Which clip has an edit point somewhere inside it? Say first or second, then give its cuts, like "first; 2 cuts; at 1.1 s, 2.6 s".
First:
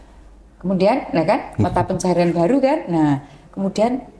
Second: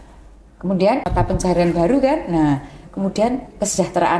second; 1 cut; at 1.1 s